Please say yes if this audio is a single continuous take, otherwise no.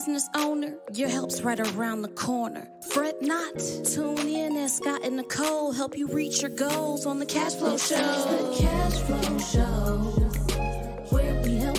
yes